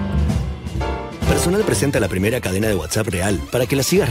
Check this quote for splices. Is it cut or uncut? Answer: cut